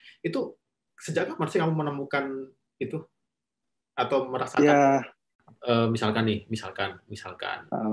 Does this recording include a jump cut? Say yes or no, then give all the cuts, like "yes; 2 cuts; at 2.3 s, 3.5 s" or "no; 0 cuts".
yes; 1 cut; at 5.5 s